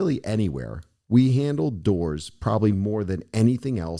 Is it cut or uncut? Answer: uncut